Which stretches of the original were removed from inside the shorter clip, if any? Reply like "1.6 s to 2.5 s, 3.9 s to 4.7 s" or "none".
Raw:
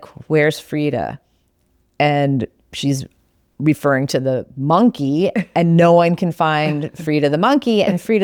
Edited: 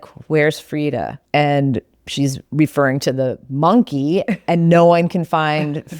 1.2 s to 1.8 s, 3.1 s to 3.5 s